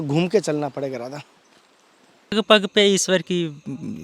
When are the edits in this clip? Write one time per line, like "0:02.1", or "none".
0:02.3